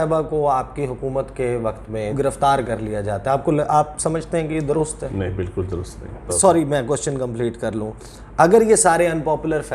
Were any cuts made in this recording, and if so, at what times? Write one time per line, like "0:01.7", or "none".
0:02.1
0:06.3